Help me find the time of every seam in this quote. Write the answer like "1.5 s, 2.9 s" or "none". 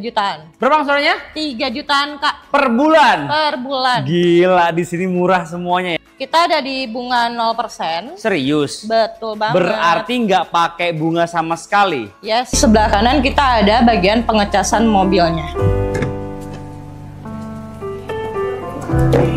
6.0 s, 12.6 s

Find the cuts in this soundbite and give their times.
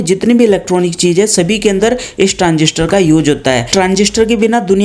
none

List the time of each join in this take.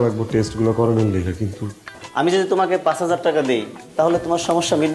2.0 s

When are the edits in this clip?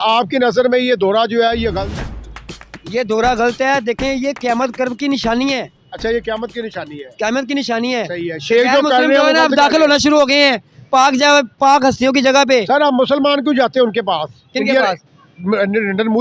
none

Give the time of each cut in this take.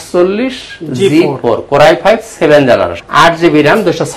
3.0 s

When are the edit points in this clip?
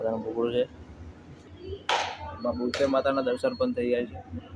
1.4 s

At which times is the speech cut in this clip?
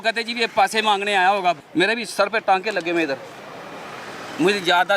1.6 s

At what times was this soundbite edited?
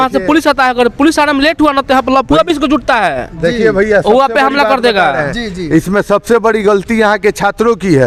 none

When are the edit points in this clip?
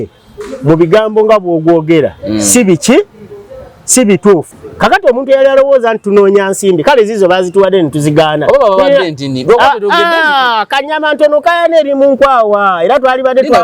4.6 s

